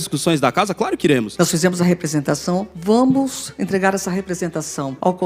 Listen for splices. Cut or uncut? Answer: cut